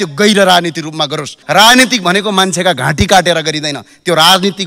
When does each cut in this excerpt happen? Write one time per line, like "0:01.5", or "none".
0:01.3